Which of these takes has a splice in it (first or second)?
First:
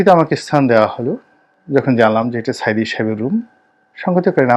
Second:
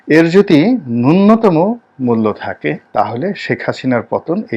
second